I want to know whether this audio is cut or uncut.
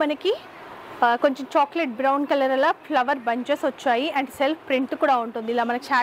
uncut